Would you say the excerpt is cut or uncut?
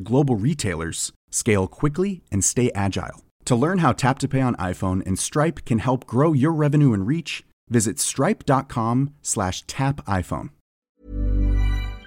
cut